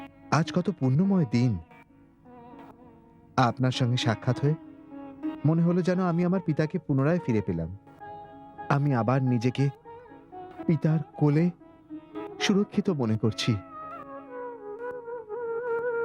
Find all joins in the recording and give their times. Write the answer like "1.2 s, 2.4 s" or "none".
none